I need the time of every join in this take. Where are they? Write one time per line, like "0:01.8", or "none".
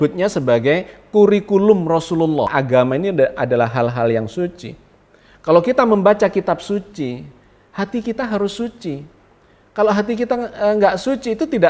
0:02.5